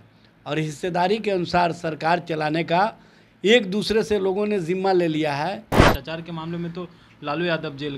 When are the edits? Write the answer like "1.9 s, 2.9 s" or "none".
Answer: 5.8 s